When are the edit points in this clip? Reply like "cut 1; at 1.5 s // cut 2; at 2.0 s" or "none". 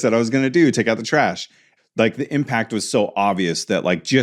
cut 1; at 1.7 s